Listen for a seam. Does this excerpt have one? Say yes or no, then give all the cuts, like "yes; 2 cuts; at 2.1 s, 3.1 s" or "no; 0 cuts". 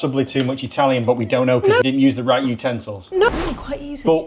yes; 2 cuts; at 1.8 s, 3.3 s